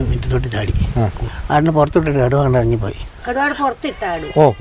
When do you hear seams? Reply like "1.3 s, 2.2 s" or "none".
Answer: 1.3 s, 3.2 s